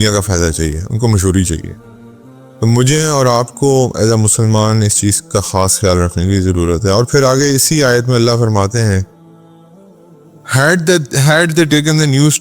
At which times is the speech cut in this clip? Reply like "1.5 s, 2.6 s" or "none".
9.1 s, 10.5 s